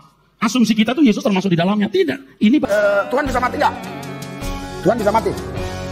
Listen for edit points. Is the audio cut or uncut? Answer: cut